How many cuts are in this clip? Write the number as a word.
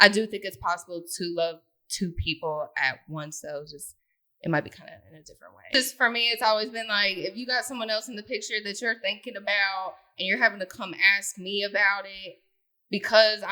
one